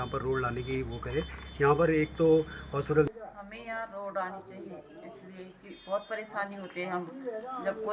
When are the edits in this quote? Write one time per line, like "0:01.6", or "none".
0:03.1

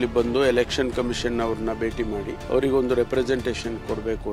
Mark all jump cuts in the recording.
0:02.3

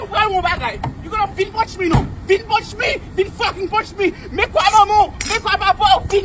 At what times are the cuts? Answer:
0:01.3

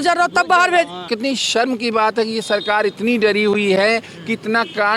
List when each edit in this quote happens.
0:01.1

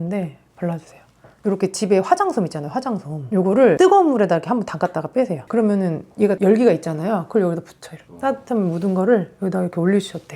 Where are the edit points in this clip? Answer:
0:01.4

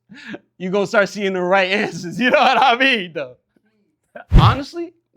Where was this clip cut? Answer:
none

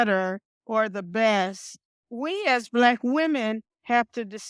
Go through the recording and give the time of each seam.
0:02.1

